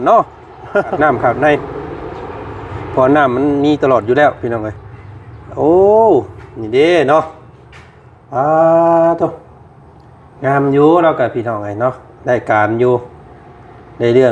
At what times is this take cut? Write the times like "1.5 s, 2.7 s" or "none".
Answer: 0.9 s